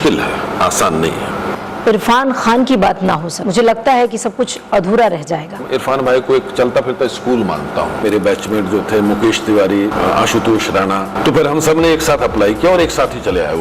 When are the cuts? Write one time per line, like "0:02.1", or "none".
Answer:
0:01.5
0:03.4
0:05.6
0:08.0
0:09.9
0:11.1